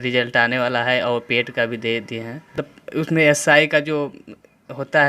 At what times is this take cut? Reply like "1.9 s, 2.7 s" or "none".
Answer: 2.5 s